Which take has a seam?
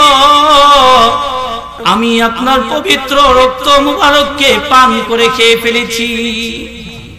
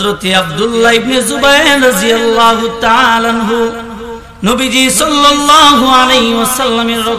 first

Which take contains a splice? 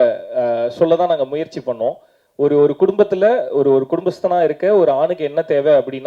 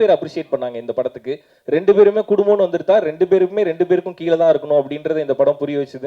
second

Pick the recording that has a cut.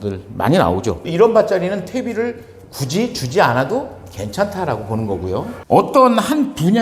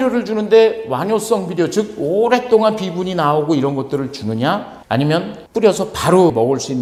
first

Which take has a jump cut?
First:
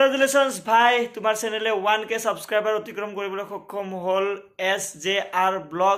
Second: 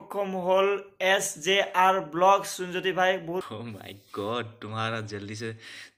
second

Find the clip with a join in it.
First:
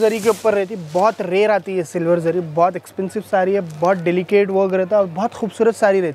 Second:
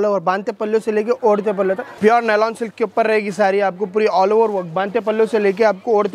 second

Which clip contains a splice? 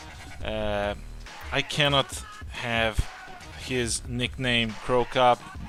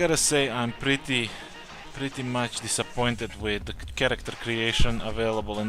second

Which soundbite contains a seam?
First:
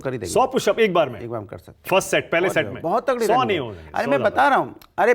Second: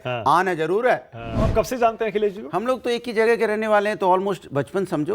second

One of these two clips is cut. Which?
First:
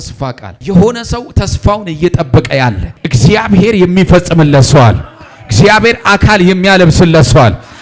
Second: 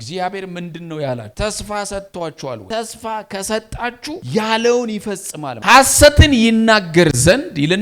second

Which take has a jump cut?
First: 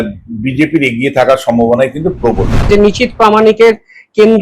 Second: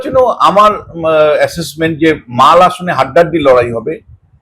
first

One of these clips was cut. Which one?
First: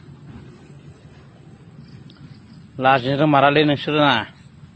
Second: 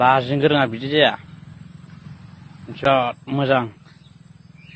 second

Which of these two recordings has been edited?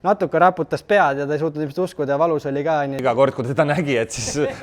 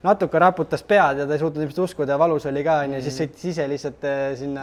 first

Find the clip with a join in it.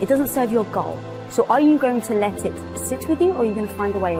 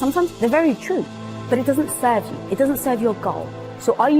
second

